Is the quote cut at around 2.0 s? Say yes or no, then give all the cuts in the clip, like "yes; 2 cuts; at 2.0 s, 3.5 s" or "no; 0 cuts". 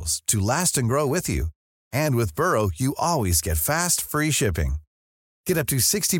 no; 0 cuts